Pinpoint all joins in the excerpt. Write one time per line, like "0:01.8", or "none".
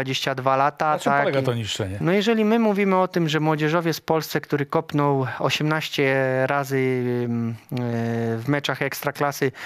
0:01.9